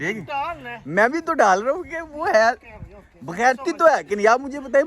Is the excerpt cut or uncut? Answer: uncut